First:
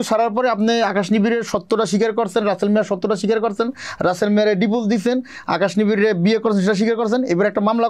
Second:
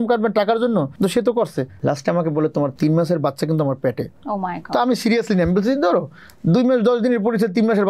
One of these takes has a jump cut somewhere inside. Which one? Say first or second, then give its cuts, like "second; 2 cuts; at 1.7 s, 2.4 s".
second; 4 cuts; at 0.9 s, 1.7 s, 2.7 s, 4.1 s